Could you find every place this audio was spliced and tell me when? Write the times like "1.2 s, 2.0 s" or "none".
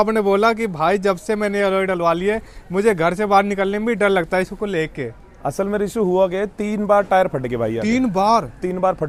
none